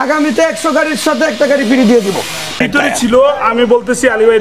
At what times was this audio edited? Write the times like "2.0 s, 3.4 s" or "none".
2.6 s